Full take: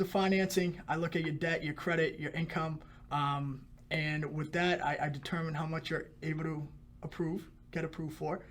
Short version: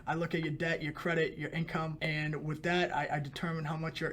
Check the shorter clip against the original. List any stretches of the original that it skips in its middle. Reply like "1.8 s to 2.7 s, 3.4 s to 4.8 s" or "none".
2.8 s to 3.8 s